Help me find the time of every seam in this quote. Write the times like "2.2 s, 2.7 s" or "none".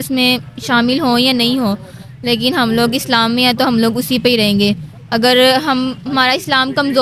none